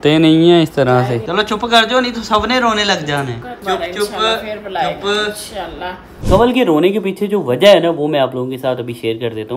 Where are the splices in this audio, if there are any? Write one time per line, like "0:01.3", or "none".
0:01.2
0:03.5
0:06.1